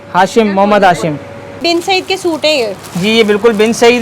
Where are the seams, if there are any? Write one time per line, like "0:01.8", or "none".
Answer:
0:01.6